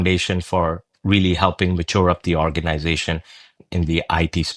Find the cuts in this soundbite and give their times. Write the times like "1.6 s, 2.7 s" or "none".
3.6 s